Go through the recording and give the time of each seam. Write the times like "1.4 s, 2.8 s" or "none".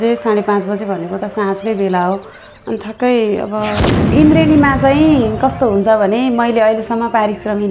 4.1 s

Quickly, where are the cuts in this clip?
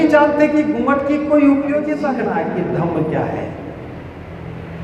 2.1 s

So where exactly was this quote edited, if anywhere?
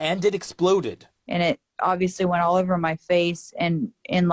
none

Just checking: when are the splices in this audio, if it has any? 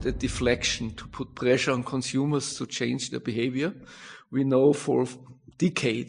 none

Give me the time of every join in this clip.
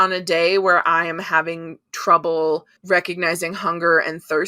2.7 s

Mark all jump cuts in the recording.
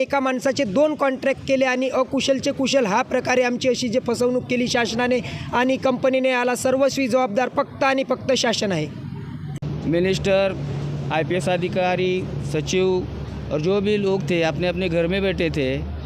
9.5 s

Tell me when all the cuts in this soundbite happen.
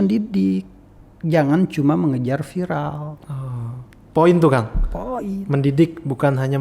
none

